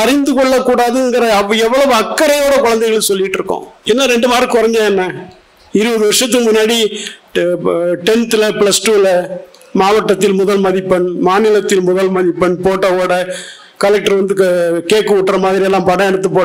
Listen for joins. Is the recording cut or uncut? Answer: cut